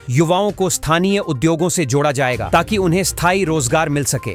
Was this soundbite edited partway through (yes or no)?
no